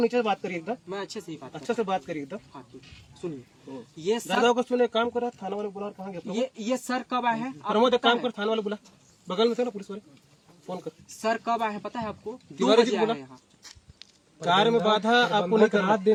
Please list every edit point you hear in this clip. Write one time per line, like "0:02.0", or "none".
none